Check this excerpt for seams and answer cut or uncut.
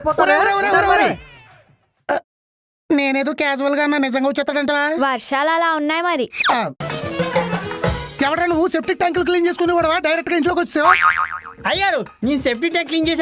cut